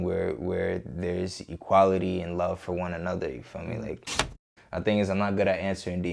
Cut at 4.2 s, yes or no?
yes